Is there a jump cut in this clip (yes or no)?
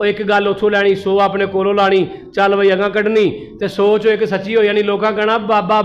no